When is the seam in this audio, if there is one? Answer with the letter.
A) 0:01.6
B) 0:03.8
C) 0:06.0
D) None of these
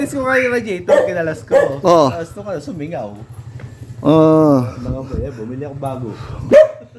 D